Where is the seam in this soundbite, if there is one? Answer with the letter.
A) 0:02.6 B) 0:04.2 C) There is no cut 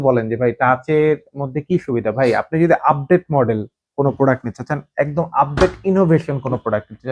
C